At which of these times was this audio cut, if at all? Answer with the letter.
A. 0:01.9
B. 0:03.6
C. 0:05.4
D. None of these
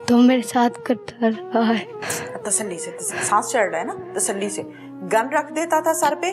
A